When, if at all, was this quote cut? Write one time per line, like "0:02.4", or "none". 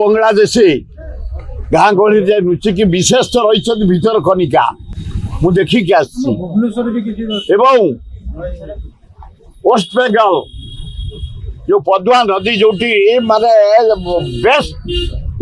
none